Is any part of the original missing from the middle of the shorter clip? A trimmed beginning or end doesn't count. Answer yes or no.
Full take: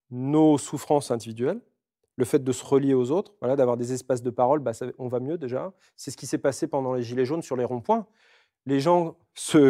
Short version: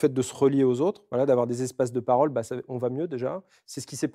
no